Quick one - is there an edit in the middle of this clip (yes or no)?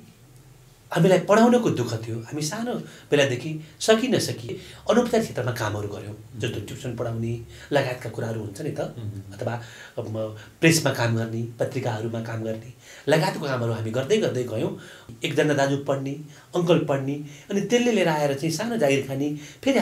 yes